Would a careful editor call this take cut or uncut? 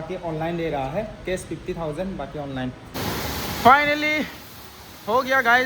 cut